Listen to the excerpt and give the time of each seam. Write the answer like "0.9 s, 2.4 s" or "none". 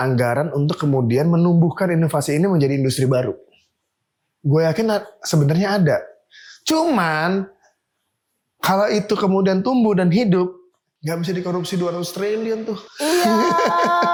none